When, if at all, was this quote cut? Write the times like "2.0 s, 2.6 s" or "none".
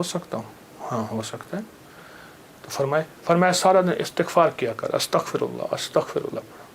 none